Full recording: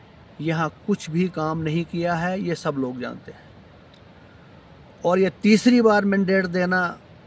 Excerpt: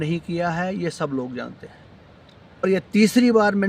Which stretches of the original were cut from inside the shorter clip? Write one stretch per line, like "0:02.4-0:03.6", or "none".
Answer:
0:04.3-0:05.1